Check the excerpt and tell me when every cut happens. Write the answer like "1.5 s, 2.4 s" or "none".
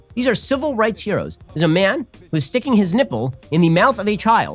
1.4 s